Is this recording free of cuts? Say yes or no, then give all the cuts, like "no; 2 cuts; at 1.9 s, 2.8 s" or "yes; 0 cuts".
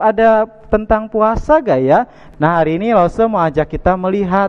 no; 1 cut; at 2.2 s